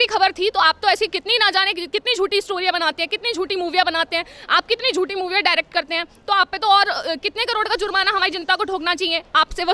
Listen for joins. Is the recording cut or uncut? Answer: uncut